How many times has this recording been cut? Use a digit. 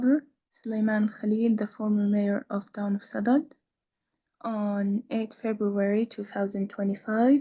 0